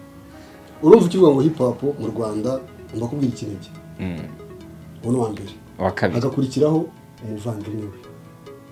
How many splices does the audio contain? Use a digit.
0